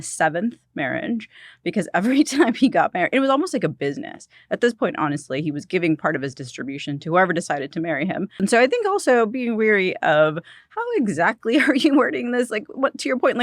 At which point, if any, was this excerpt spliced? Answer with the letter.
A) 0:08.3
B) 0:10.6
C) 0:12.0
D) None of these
A